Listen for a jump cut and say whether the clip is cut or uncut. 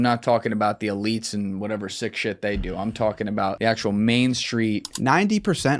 cut